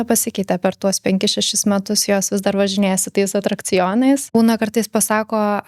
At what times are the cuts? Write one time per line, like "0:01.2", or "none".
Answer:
0:04.2